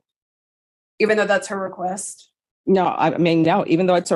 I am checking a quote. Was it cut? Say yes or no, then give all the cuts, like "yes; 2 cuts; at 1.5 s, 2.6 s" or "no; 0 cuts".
no; 0 cuts